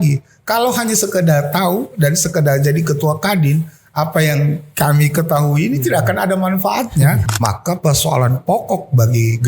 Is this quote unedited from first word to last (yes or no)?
no